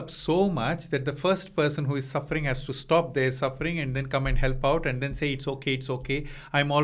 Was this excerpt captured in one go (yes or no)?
yes